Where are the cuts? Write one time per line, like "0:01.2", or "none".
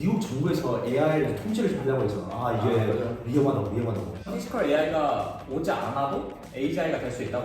0:04.2